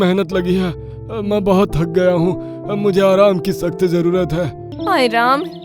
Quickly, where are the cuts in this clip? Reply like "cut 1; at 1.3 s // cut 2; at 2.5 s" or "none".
cut 1; at 4.6 s